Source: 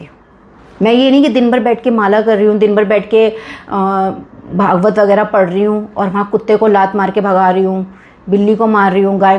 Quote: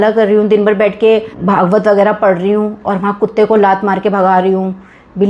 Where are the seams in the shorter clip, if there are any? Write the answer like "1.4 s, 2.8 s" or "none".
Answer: 1.3 s